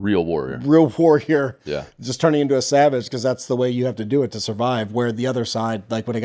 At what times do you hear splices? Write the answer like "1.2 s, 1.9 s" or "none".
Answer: none